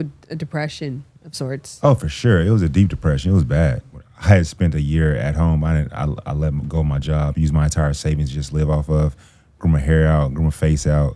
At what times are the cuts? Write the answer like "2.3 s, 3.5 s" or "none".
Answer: 3.9 s